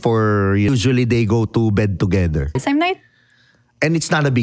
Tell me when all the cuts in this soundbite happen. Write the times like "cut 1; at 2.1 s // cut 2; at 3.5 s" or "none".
cut 1; at 0.7 s // cut 2; at 2.6 s